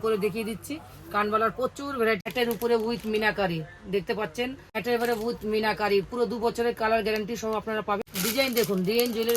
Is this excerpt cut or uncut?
cut